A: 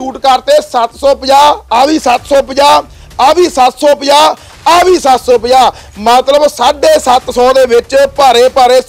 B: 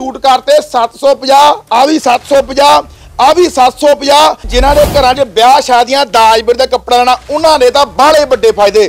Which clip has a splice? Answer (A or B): B